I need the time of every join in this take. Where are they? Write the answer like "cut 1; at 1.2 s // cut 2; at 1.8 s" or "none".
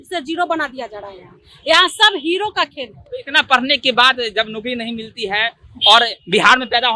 none